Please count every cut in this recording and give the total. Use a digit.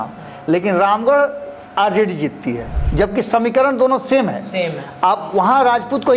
1